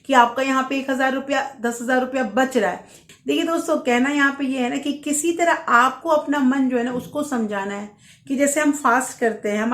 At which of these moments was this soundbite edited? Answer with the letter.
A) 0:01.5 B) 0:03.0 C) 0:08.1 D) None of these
B